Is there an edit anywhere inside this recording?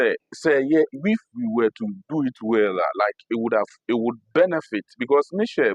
no; 0 cuts

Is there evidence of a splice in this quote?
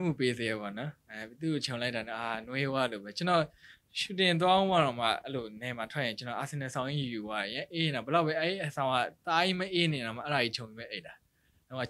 no; 0 cuts

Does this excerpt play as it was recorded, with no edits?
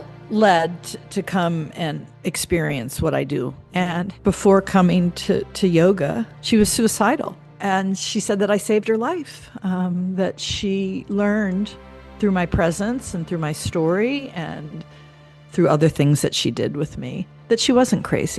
no; 4 cuts; at 2.1 s, 3.6 s, 6.3 s, 7.4 s

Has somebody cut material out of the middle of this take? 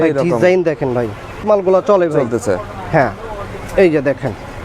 yes; 1 cut; at 1.4 s

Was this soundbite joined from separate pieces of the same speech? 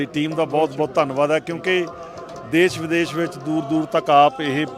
no; 0 cuts

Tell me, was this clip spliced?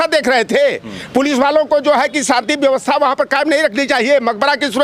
no; 0 cuts

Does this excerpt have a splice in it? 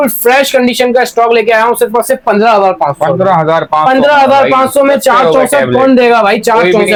no; 0 cuts

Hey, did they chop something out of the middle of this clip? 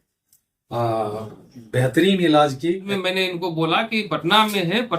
yes; 1 cut; at 2.9 s

